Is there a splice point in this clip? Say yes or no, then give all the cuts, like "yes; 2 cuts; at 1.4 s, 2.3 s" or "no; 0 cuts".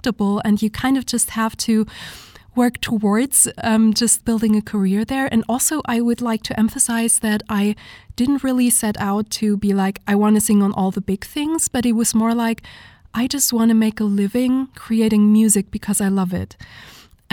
no; 0 cuts